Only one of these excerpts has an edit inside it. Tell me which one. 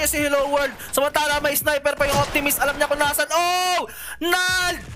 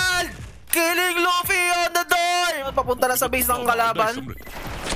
second; 1 cut; at 2.6 s

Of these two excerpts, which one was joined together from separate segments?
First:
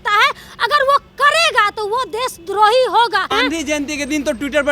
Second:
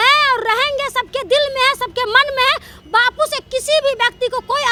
first; 1 cut; at 3.5 s

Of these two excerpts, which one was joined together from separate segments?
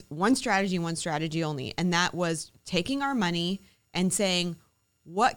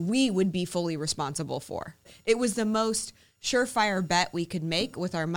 second; 1 cut; at 2.1 s

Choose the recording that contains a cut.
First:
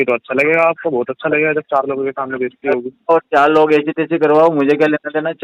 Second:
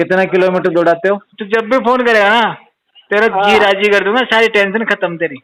second; 1 cut; at 1.3 s

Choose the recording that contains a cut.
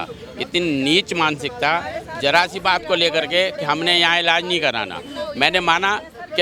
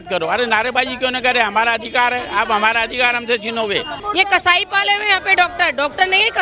second; 1 cut; at 4.0 s

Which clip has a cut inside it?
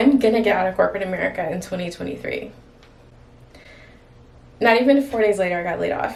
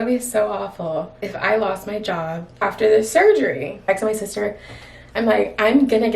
second; 3 cuts; at 1.2 s, 2.6 s, 3.8 s

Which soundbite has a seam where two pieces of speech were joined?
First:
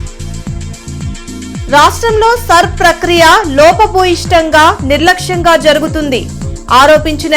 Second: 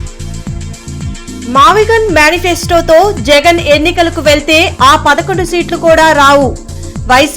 second; 1 cut; at 1.2 s

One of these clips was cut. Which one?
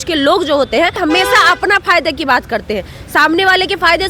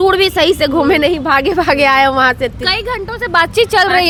first; 1 cut; at 1.0 s

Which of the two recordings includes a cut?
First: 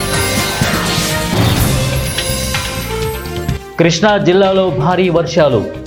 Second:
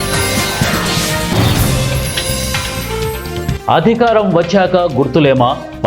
second; 3 cuts; at 0.9 s, 2.2 s, 3.6 s

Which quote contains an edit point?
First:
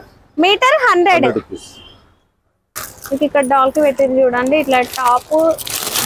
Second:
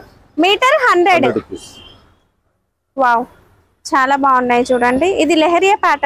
first; 1 cut; at 2.8 s

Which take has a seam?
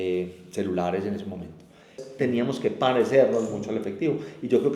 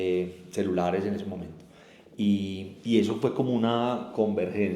first; 1 cut; at 2.0 s

